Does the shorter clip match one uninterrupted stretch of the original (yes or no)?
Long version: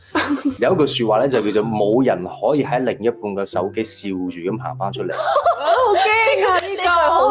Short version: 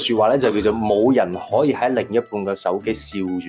yes